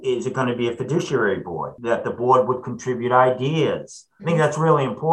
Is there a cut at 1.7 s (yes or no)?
yes